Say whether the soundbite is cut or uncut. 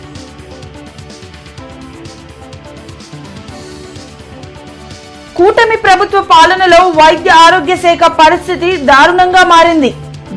uncut